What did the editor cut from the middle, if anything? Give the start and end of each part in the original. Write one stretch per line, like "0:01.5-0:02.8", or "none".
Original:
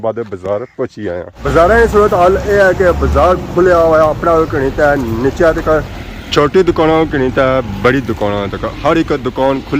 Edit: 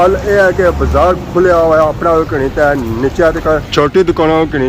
0:05.9-0:06.3

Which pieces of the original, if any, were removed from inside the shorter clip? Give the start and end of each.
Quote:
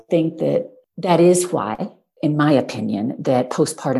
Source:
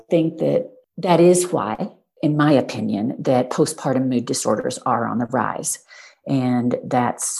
none

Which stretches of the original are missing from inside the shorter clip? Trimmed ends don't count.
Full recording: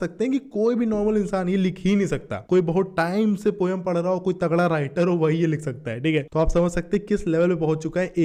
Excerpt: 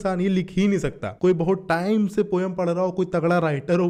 none

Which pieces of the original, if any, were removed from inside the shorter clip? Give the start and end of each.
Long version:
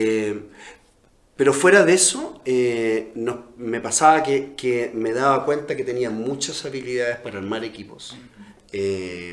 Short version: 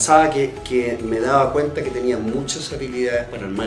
none

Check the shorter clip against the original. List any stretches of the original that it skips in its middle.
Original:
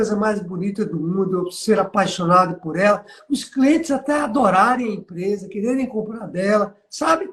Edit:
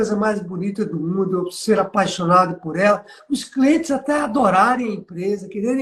none

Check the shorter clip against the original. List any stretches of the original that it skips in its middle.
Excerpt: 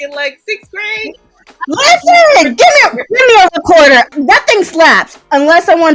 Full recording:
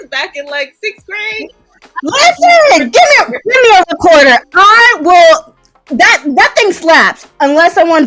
0:04.5-0:06.2

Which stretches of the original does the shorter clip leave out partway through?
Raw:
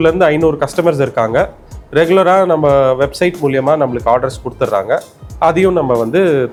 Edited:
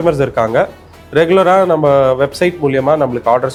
none

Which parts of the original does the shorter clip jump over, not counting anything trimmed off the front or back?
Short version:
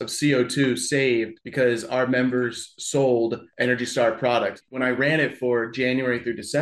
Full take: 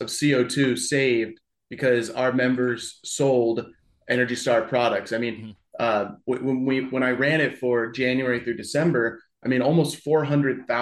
0:01.4-0:01.7
0:03.7-0:04.0
0:05.1-0:06.8

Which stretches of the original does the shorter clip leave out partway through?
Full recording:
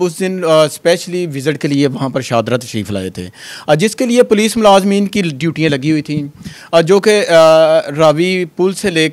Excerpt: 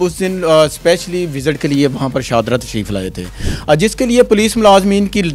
none

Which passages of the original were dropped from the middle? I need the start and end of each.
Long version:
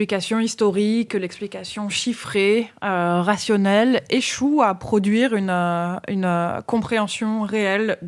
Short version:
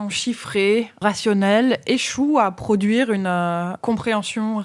0:02.8-0:03.2
0:06.0-0:06.6

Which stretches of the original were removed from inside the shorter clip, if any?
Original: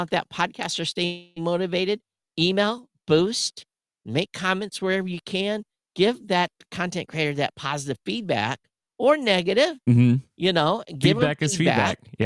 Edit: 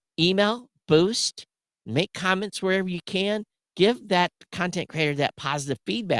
none

